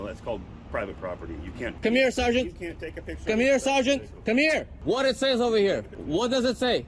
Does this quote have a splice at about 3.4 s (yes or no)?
no